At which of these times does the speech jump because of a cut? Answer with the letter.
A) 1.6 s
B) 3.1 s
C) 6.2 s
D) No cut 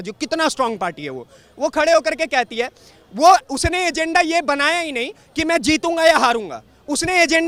D